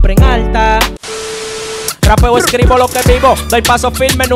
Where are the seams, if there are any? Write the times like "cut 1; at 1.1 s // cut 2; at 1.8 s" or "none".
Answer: cut 1; at 1.3 s